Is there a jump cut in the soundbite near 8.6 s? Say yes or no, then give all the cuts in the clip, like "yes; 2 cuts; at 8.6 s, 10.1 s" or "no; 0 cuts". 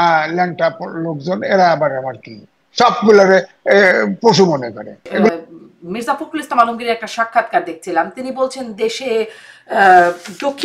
no; 1 cut; at 5.3 s